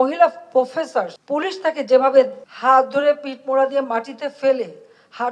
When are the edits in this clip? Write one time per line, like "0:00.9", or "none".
0:01.1
0:02.4